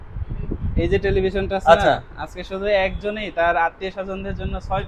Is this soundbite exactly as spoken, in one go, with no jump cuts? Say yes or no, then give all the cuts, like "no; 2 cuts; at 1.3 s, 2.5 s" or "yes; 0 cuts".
yes; 0 cuts